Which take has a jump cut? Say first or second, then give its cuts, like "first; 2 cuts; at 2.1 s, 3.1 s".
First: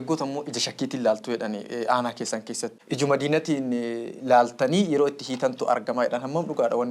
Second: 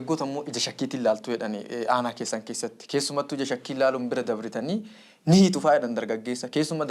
first; 1 cut; at 2.7 s